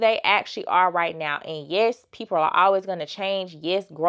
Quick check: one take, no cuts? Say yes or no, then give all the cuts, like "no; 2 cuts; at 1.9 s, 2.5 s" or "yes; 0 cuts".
yes; 0 cuts